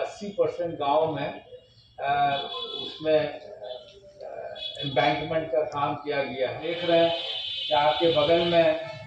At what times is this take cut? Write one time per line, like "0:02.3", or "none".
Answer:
0:06.7